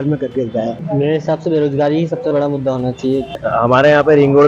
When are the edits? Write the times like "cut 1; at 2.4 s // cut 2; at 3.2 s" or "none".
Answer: cut 1; at 0.8 s // cut 2; at 3.4 s

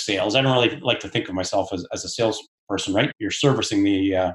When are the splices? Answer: cut 1; at 3.0 s

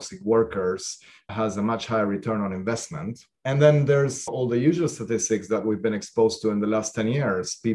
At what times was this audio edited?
none

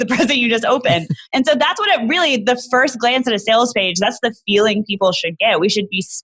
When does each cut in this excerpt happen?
cut 1; at 1.2 s

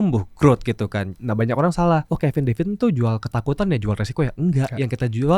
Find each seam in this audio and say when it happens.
cut 1; at 1.1 s // cut 2; at 2.1 s

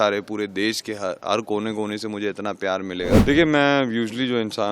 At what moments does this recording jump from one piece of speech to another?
cut 1; at 3.2 s

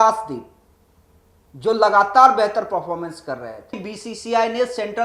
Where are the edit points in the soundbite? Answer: cut 1; at 3.9 s

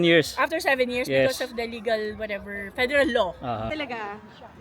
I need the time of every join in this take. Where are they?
cut 1; at 3.7 s

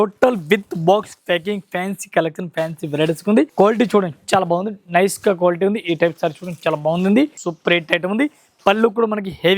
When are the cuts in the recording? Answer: cut 1; at 3.5 s // cut 2; at 7.4 s

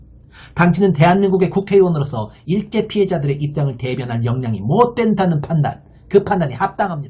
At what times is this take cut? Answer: none

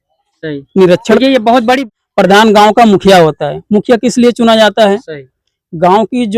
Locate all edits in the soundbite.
cut 1; at 1.8 s

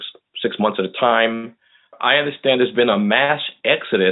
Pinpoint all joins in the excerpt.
cut 1; at 2.0 s

